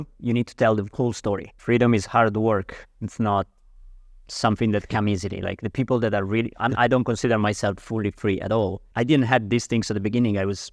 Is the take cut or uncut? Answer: cut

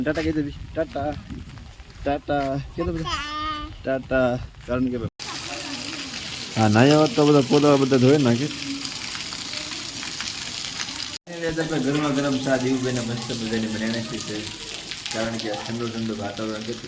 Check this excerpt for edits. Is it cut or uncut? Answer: cut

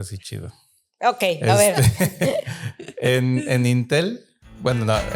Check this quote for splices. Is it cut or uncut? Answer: uncut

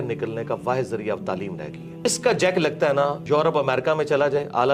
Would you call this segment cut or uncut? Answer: cut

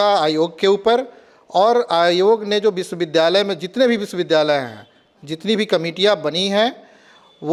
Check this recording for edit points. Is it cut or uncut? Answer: uncut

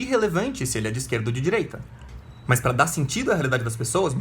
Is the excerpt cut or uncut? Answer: uncut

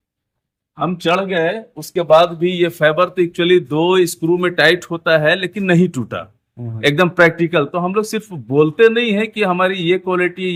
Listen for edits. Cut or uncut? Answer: uncut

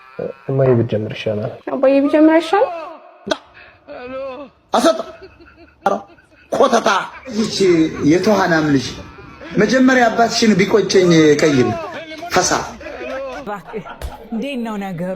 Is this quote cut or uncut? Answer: cut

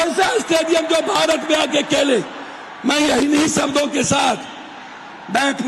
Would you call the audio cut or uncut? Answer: uncut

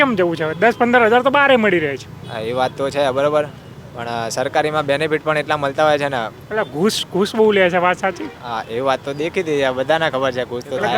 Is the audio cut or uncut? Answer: uncut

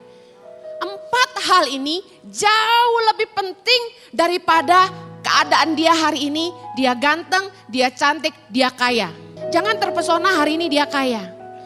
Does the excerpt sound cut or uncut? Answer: cut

